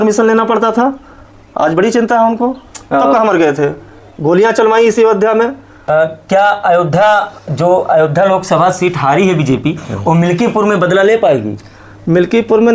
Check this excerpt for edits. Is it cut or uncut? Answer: cut